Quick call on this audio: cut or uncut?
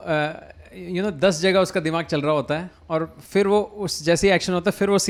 uncut